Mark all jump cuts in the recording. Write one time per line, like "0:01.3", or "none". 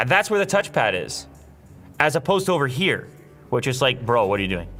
none